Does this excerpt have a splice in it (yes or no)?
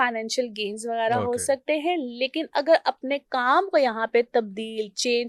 no